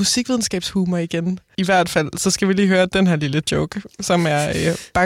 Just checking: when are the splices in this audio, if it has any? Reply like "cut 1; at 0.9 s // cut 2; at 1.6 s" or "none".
cut 1; at 1.4 s